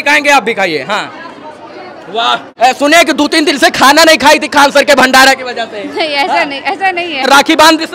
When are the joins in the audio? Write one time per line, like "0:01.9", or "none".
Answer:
0:02.5
0:07.3